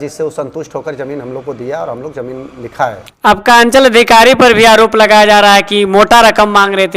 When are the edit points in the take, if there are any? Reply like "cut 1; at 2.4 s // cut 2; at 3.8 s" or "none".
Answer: cut 1; at 3.1 s